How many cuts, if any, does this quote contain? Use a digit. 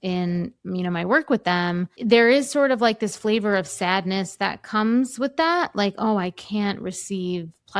1